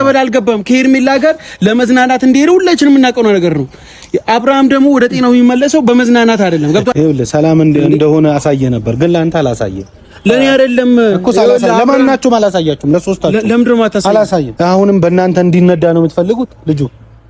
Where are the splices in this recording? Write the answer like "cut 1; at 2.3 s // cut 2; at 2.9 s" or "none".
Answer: cut 1; at 6.9 s // cut 2; at 14.5 s